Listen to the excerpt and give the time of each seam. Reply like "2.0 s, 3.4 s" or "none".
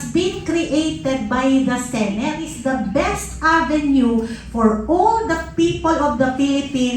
2.4 s